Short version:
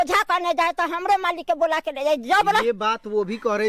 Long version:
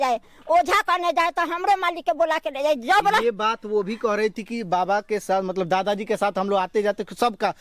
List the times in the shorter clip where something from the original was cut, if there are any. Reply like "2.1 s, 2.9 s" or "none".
none